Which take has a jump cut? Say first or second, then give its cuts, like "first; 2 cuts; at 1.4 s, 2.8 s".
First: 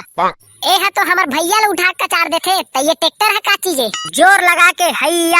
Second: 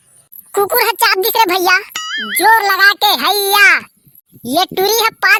first; 1 cut; at 3.9 s